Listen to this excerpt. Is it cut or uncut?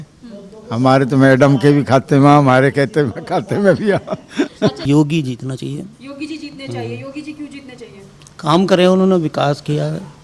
cut